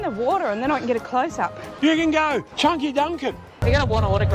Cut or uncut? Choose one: cut